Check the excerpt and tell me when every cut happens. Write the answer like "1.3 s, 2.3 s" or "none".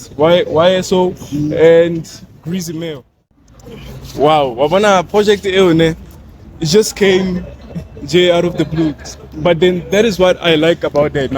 3.1 s